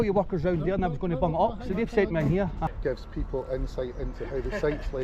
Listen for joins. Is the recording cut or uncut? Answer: cut